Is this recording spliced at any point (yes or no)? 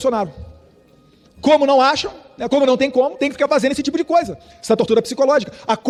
no